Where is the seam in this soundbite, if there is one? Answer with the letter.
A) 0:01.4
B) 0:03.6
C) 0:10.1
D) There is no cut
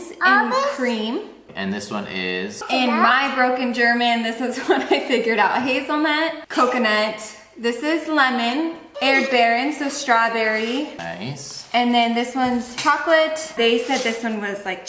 A